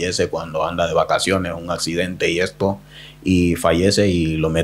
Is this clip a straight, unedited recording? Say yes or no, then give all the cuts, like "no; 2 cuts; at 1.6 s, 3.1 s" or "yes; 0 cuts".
yes; 0 cuts